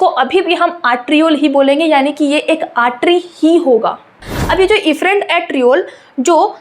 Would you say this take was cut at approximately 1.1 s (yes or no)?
no